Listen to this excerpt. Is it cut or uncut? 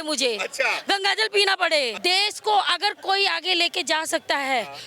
cut